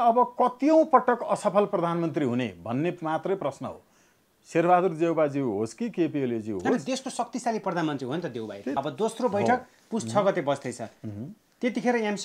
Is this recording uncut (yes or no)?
no